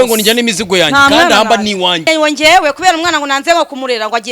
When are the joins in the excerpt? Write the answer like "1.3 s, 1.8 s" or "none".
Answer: 2.1 s